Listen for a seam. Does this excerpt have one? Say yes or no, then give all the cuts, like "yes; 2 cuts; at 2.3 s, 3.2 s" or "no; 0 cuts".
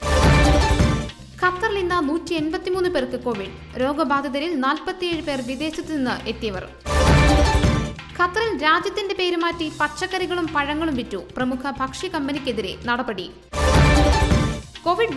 yes; 1 cut; at 1.1 s